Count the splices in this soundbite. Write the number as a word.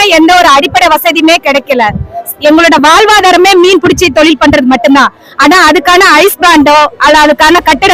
zero